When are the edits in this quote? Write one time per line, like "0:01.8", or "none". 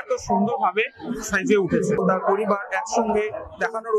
0:02.0

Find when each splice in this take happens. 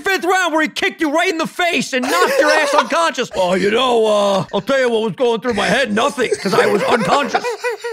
0:03.3
0:04.5

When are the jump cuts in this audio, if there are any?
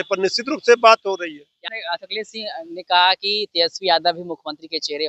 0:01.7

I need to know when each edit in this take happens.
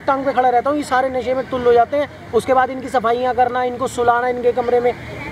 none

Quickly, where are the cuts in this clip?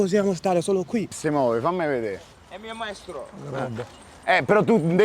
0:01.2

